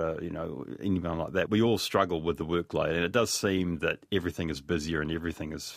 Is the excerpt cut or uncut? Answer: cut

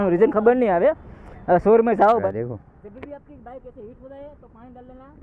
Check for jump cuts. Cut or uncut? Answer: cut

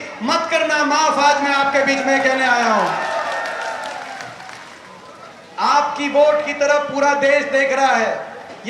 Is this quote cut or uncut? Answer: uncut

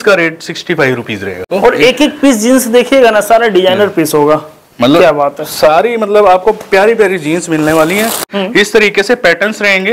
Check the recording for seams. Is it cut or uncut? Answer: cut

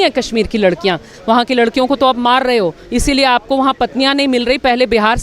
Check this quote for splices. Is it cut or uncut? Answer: cut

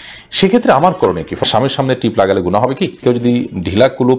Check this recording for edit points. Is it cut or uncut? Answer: cut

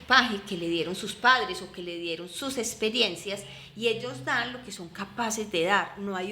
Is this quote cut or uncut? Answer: uncut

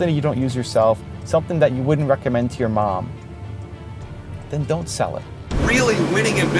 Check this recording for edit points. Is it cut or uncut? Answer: cut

